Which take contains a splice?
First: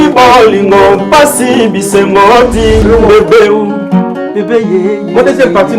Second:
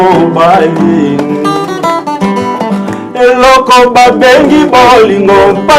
first; 1 cut; at 2.8 s

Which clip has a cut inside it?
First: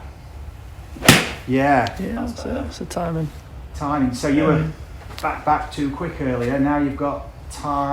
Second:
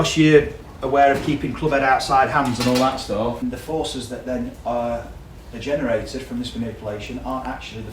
second; 1 cut; at 3.4 s

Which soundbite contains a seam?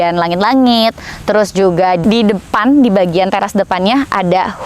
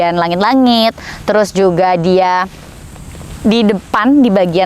first; 1 cut; at 2.0 s

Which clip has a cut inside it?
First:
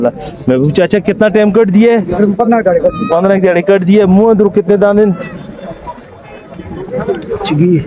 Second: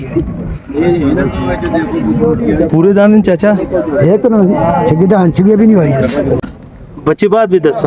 second; 1 cut; at 6.4 s

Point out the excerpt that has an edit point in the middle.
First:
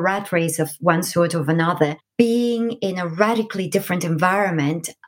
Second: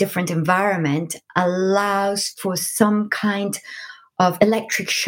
first; 1 cut; at 2.0 s

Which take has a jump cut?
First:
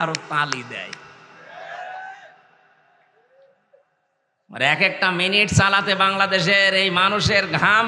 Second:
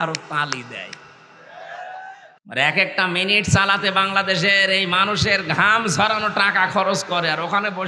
second; 1 cut; at 2.3 s

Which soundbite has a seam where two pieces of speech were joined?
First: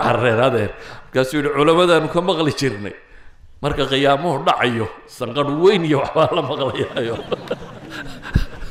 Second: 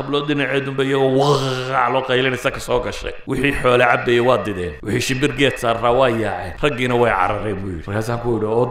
second; 4 cuts; at 3.1 s, 4.7 s, 6.5 s, 7.7 s

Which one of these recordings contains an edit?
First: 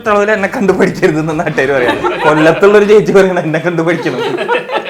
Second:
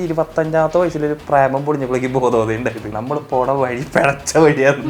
second; 1 cut; at 2.9 s

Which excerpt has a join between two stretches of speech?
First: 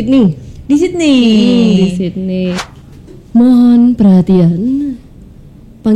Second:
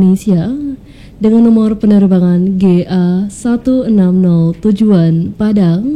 first; 1 cut; at 2.6 s

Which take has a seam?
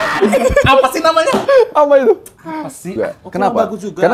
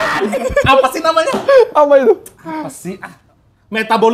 first; 1 cut; at 3.0 s

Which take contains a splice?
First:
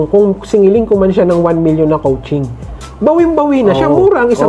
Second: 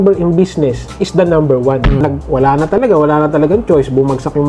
second; 1 cut; at 2.0 s

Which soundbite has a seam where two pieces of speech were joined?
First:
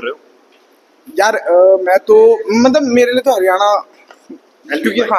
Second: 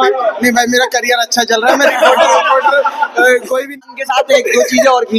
second; 1 cut; at 3.8 s

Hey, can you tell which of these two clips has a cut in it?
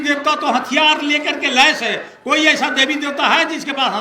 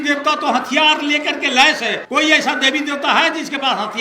second; 1 cut; at 2.0 s

